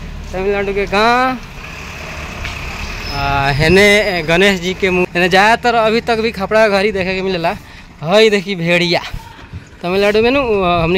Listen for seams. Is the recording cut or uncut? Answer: cut